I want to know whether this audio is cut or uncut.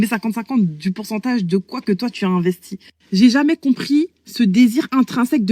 cut